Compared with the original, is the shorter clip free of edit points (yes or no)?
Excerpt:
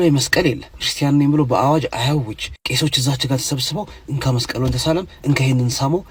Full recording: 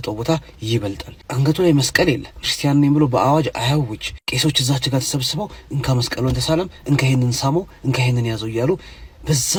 yes